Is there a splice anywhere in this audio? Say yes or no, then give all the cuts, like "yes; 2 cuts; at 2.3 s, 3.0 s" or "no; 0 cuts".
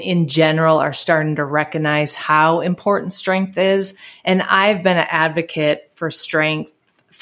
no; 0 cuts